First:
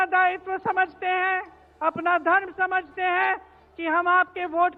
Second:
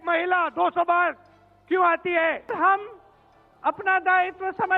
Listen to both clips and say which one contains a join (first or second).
second